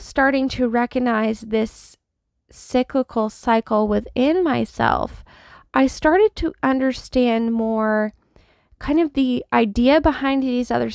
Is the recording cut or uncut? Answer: uncut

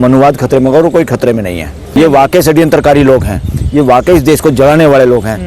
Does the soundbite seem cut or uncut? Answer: cut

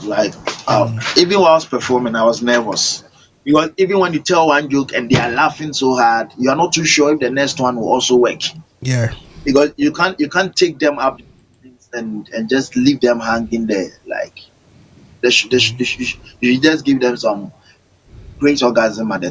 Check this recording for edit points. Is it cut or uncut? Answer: uncut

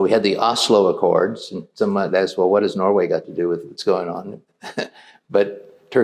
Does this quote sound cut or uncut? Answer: uncut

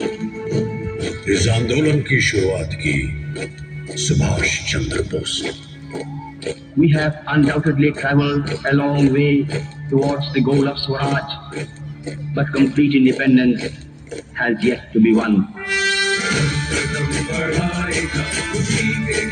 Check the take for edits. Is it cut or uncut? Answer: uncut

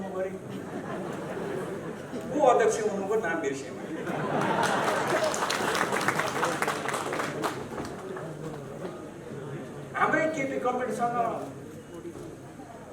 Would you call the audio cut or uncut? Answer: uncut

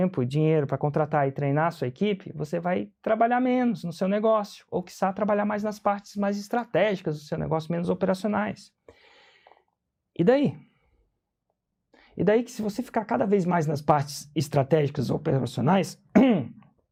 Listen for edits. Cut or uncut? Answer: uncut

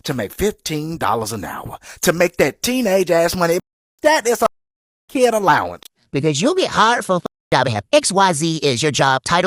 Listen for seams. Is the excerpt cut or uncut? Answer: uncut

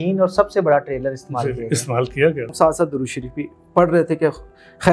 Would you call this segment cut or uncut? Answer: cut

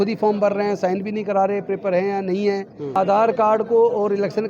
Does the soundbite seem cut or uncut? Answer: cut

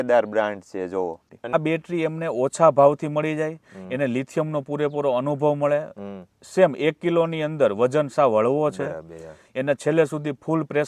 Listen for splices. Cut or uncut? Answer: cut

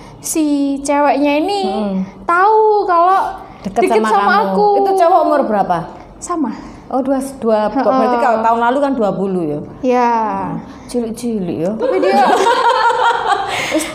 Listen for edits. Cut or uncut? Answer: uncut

